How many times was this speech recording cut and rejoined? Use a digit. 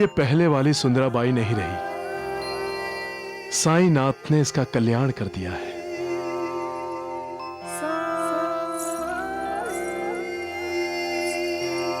0